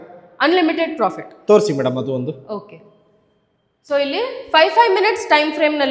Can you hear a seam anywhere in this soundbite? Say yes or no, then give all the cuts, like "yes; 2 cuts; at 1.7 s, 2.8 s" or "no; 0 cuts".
no; 0 cuts